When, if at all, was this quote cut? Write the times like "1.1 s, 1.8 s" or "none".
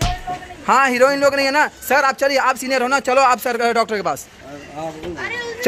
none

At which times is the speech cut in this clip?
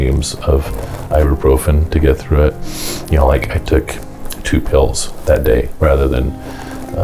none

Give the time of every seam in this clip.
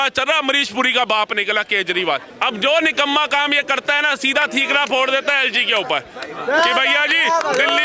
2.3 s

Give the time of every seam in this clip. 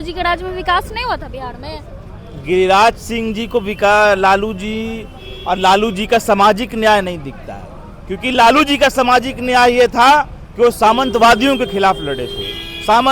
none

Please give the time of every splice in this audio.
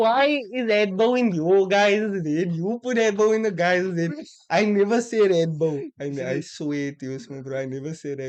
none

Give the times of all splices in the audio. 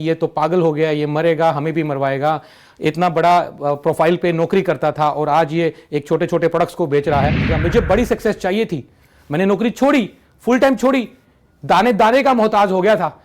7.5 s

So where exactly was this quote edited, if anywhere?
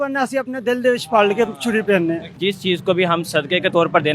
2.3 s

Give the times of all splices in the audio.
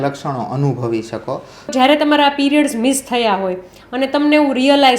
1.7 s

